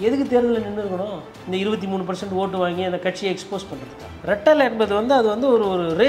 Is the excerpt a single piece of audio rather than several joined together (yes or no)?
no